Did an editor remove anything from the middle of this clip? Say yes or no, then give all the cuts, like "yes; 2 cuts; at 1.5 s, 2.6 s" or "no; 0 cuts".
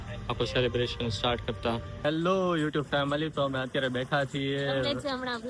yes; 1 cut; at 2.0 s